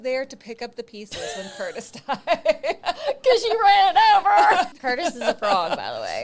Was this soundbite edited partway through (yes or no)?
yes